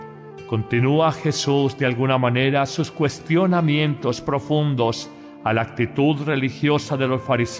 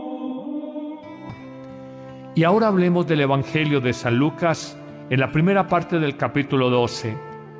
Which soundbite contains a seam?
second; 1 cut; at 1.7 s

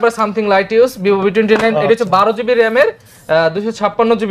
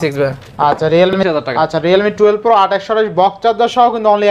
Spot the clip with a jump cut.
second; 1 cut; at 1.1 s

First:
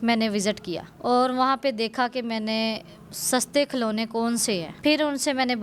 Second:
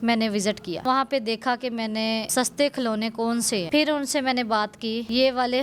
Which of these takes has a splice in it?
second; 3 cuts; at 0.8 s, 2.3 s, 3.6 s

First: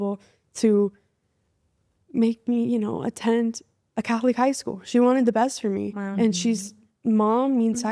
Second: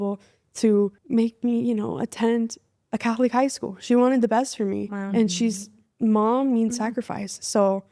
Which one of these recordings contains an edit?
second; 1 cut; at 1.0 s

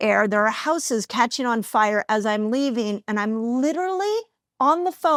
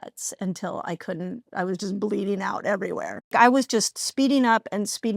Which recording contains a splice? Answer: second; 1 cut; at 3.3 s

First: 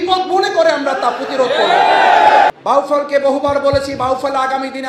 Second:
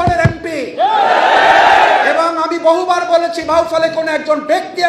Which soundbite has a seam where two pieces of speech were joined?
first; 1 cut; at 2.5 s

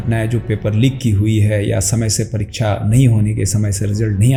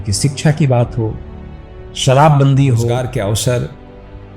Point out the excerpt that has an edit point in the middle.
second; 1 cut; at 3.0 s

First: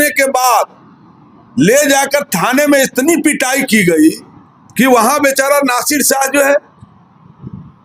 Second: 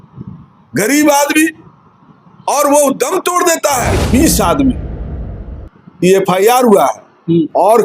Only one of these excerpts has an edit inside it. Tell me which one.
second; 1 cut; at 4.0 s

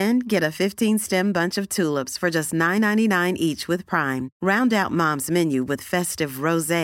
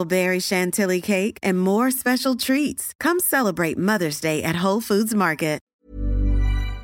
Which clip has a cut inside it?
second; 1 cut; at 5.6 s

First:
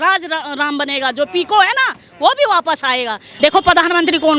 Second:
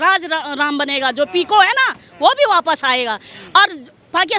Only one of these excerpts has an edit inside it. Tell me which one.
first; 1 cut; at 3.2 s

